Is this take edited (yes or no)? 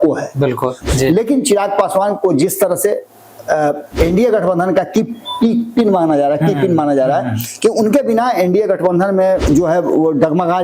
yes